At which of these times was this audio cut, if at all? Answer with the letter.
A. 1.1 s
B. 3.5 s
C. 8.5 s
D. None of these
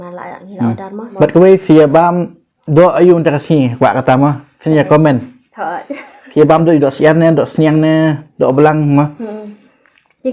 A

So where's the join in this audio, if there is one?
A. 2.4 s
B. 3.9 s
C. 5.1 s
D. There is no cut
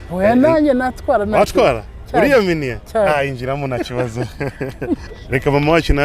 C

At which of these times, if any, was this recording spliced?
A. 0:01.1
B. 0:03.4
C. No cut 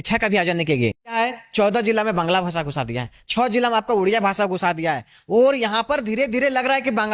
A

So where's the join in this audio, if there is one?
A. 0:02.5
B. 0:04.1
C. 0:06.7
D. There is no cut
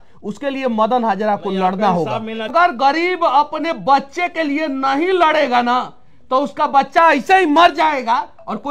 A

